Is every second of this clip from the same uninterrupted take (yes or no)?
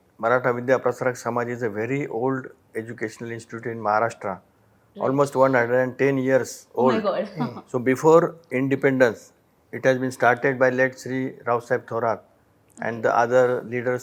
yes